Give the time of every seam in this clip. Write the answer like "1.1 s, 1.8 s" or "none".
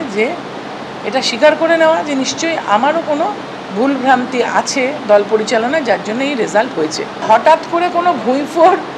7.1 s

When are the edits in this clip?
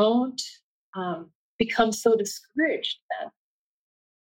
none

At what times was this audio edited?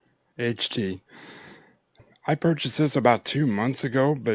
2.0 s

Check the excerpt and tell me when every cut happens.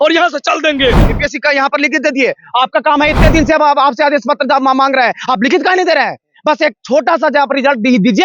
1.0 s

